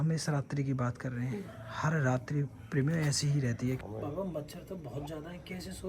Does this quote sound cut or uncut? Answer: cut